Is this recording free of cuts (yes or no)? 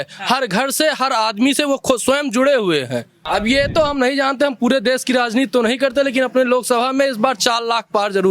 no